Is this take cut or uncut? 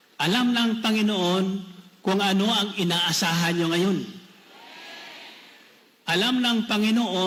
uncut